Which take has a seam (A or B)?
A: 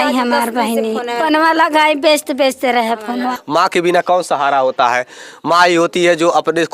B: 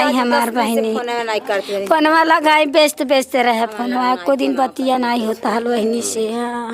A